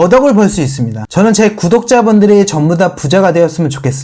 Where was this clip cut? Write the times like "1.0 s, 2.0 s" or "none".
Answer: none